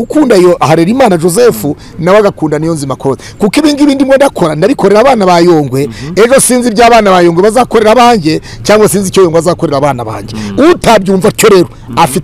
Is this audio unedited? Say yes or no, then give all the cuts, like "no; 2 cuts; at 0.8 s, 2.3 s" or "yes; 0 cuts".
yes; 0 cuts